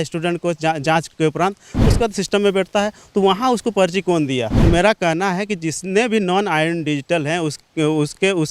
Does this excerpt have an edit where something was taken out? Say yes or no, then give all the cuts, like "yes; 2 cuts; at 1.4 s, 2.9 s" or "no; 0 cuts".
yes; 1 cut; at 4.6 s